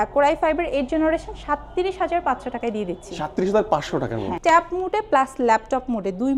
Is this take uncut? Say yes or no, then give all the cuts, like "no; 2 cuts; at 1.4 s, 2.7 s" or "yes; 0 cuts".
no; 1 cut; at 4.3 s